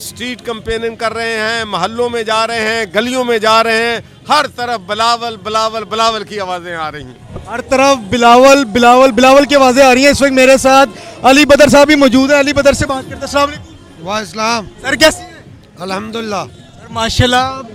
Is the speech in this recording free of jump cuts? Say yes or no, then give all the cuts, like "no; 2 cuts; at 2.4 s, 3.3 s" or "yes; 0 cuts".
yes; 0 cuts